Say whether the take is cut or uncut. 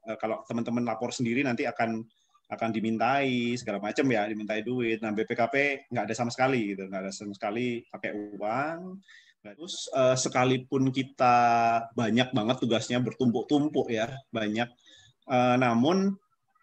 cut